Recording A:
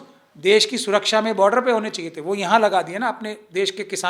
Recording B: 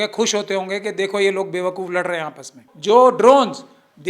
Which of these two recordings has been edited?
B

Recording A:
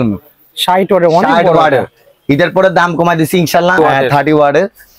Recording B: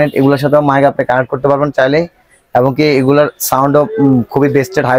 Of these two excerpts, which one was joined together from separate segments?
A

